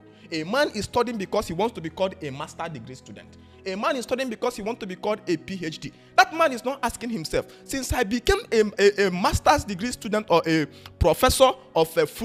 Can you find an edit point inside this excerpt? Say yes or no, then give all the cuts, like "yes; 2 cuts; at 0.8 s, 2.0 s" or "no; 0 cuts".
no; 0 cuts